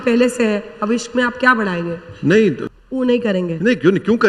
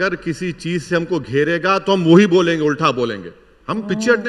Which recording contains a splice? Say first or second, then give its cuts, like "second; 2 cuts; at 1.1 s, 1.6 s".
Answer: first; 1 cut; at 2.6 s